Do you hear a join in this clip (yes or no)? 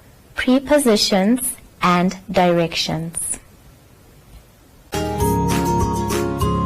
no